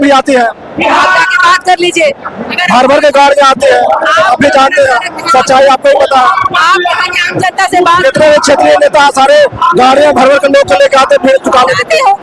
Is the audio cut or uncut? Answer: uncut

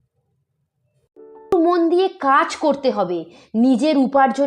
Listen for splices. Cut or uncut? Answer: cut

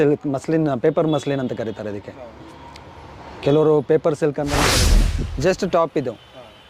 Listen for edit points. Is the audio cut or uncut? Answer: cut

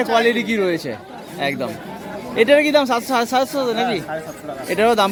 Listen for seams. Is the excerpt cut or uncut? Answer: uncut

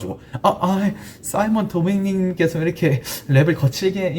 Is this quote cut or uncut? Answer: uncut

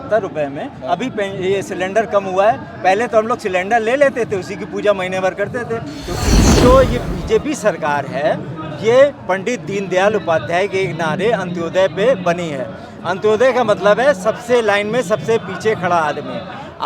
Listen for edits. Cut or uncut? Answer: cut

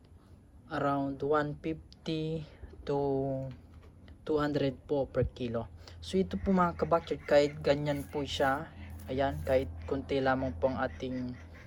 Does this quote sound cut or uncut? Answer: uncut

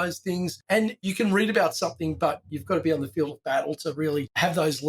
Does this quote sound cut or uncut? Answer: cut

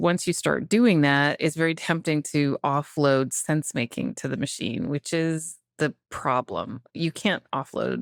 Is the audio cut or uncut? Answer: uncut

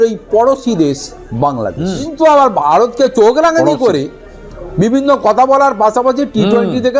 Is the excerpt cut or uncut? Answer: cut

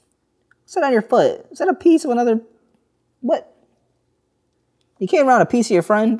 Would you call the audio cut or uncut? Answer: uncut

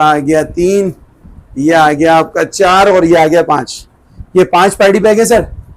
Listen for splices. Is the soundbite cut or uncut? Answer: uncut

